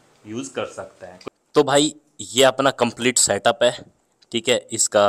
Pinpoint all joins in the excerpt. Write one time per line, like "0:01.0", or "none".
0:01.2